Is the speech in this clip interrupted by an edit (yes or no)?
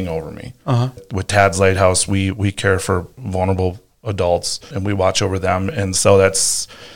yes